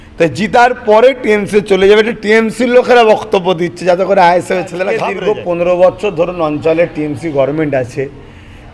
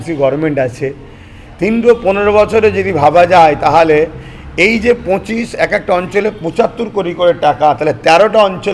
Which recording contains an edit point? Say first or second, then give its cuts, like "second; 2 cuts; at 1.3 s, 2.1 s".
first; 1 cut; at 5.1 s